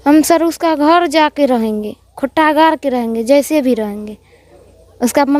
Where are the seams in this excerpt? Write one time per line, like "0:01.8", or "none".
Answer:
none